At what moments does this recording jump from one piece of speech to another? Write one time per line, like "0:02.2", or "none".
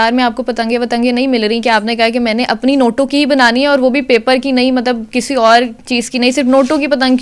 none